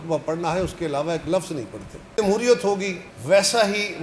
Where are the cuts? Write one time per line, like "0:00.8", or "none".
0:02.0